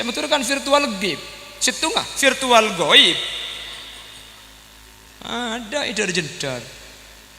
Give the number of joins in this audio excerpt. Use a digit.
1